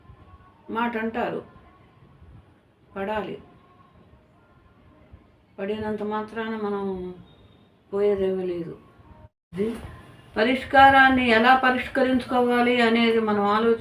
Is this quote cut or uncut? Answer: cut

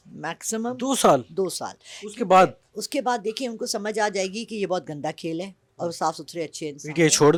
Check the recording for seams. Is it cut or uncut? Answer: uncut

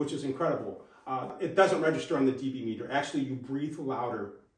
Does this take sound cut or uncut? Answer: cut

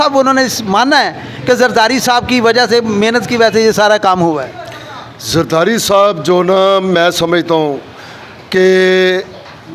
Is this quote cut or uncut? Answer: uncut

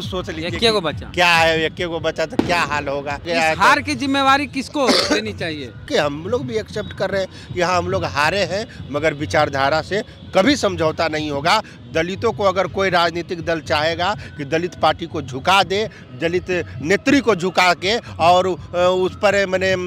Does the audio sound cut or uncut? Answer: cut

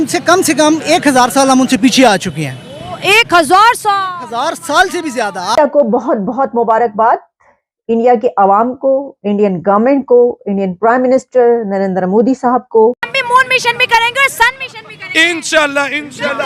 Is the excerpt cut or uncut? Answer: cut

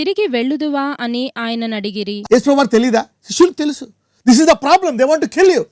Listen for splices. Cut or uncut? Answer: cut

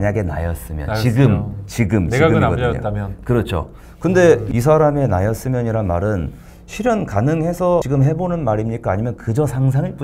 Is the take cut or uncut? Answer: cut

